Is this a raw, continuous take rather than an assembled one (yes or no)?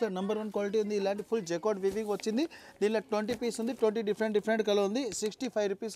yes